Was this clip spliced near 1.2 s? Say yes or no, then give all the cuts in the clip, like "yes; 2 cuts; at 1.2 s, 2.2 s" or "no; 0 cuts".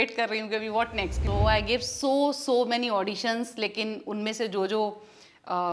yes; 1 cut; at 1.2 s